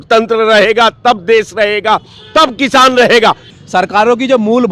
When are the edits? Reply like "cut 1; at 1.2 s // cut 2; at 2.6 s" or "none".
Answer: none